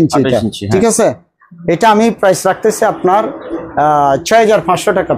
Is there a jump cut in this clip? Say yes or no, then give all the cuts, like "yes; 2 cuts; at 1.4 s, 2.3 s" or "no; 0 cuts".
no; 0 cuts